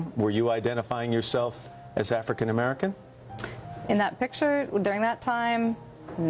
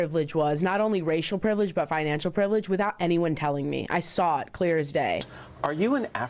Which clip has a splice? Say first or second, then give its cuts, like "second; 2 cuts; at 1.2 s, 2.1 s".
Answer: second; 1 cut; at 5.4 s